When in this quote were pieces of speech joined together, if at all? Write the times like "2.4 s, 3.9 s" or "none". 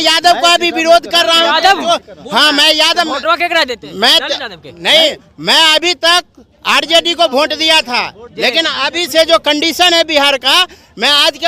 none